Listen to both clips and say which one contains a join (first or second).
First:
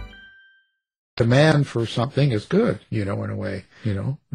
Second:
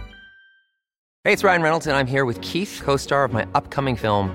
second